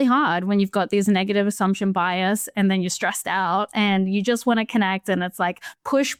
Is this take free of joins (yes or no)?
yes